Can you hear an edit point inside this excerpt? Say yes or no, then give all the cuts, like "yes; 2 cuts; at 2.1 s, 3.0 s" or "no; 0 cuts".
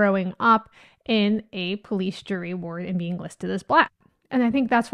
yes; 1 cut; at 3.9 s